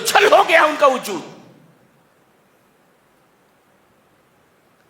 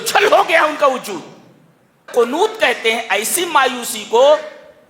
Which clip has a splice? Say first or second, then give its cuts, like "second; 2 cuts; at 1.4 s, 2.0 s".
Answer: second; 1 cut; at 2.1 s